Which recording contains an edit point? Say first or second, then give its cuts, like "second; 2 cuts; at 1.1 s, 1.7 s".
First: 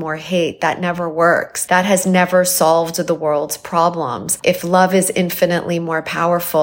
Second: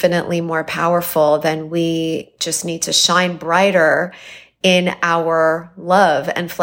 first; 2 cuts; at 1.5 s, 4.3 s